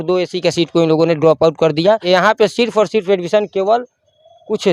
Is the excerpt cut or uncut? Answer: cut